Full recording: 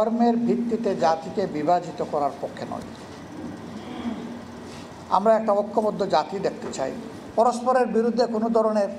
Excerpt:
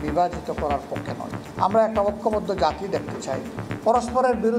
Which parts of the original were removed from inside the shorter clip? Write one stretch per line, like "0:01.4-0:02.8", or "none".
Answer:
0:02.9-0:04.9